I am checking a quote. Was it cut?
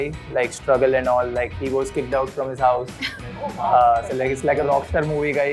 no; 0 cuts

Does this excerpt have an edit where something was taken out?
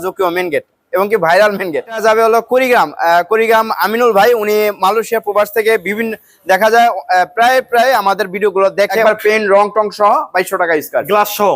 yes; 2 cuts; at 2.0 s, 9.0 s

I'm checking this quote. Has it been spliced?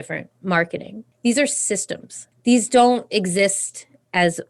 yes; 2 cuts; at 1.0 s, 2.2 s

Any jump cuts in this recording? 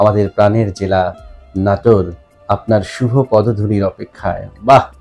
no; 0 cuts

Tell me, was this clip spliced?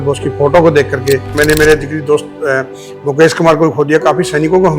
yes; 1 cut; at 1.3 s

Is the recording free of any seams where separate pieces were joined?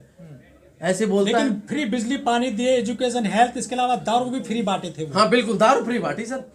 yes; 0 cuts

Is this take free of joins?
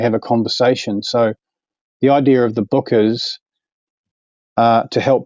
yes; 0 cuts

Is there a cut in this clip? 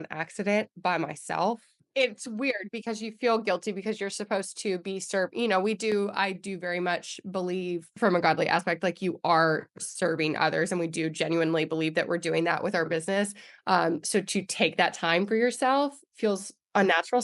no; 0 cuts

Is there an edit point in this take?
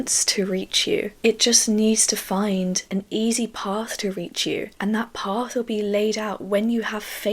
yes; 2 cuts; at 2.8 s, 4.7 s

